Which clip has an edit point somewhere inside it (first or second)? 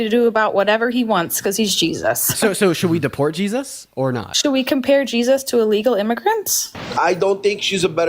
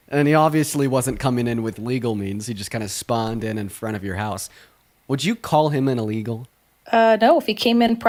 first